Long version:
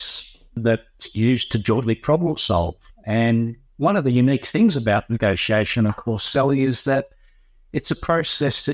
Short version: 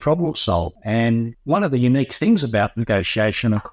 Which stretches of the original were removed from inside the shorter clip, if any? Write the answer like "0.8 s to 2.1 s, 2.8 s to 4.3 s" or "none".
3.0 s to 3.3 s